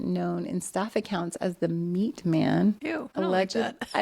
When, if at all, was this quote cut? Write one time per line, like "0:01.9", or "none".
0:03.0